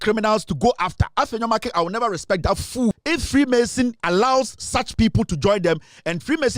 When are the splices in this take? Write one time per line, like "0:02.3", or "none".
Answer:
0:02.9
0:04.0